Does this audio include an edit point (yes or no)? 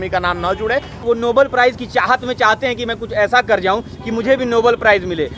yes